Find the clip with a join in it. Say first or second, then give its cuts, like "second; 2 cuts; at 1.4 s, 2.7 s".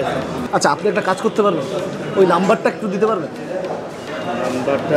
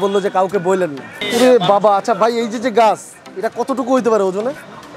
second; 1 cut; at 1.2 s